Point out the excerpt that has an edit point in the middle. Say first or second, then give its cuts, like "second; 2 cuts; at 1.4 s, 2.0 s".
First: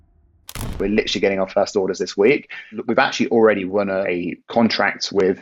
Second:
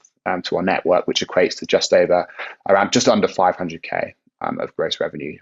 first; 3 cuts; at 0.8 s, 2.7 s, 4.0 s